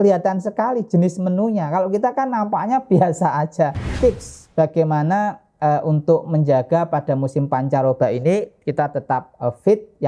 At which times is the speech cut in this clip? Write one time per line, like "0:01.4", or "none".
0:04.0

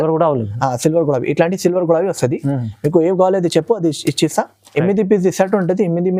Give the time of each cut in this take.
none

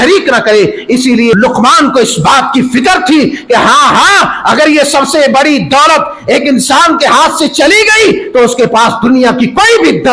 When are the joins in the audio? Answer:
0:01.3

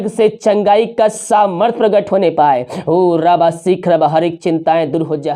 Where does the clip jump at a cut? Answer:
none

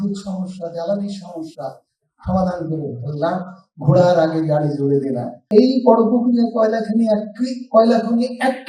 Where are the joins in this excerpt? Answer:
0:05.4

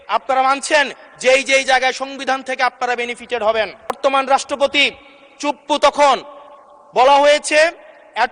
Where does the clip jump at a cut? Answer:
0:04.0

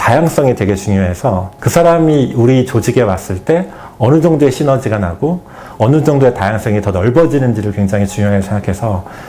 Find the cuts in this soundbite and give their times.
0:01.6

